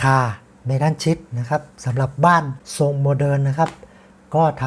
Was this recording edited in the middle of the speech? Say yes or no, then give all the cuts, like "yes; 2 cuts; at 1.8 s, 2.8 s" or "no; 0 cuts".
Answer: yes; 1 cut; at 2.6 s